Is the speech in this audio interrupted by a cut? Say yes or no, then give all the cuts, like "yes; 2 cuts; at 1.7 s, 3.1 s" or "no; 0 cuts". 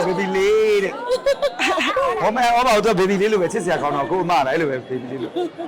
yes; 1 cut; at 2.2 s